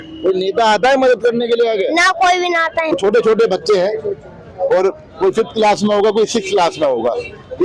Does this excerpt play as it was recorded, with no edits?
no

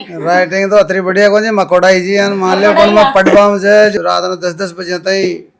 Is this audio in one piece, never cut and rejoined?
yes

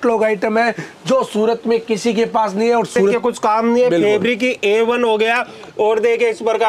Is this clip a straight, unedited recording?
no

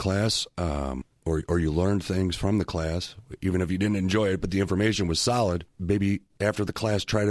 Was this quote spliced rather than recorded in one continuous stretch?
yes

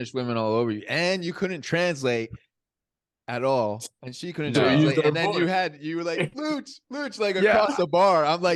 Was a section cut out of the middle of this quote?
no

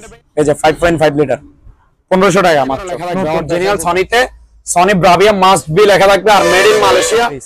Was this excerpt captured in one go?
no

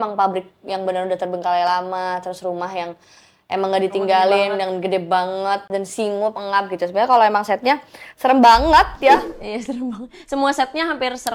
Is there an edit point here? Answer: no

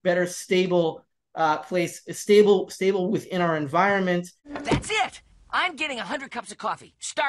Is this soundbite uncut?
no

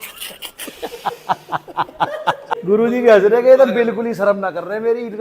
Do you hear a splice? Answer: yes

